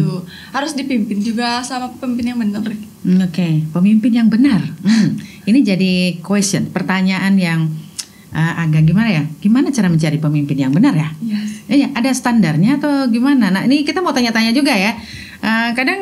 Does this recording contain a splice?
no; 0 cuts

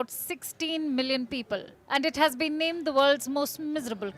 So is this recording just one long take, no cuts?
no; 1 cut; at 1.7 s

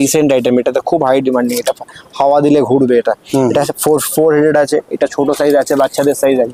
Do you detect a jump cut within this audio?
no; 0 cuts

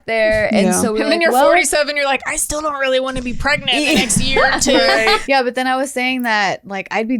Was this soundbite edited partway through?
yes; 1 cut; at 5.2 s

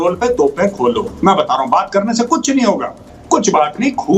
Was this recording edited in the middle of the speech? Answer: yes; 1 cut; at 3.1 s

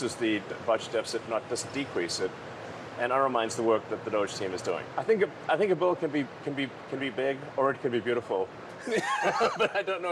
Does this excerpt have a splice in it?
yes; 1 cut; at 4.9 s

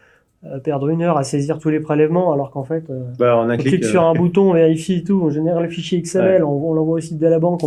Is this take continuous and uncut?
yes; 0 cuts

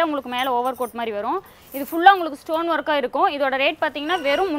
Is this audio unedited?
yes; 0 cuts

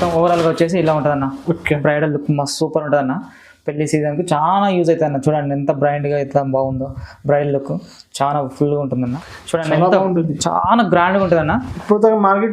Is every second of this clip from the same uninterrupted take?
no; 1 cut; at 9.3 s

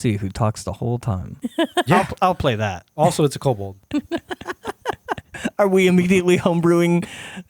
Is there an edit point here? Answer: yes; 4 cuts; at 1.3 s, 2.8 s, 3.8 s, 5.3 s

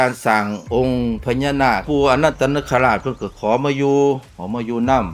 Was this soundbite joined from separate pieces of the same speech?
yes; 1 cut; at 1.8 s

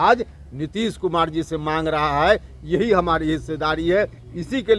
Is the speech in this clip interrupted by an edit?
no; 0 cuts

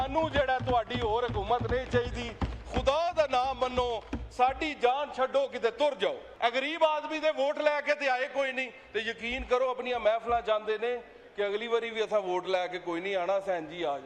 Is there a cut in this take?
yes; 1 cut; at 6.3 s

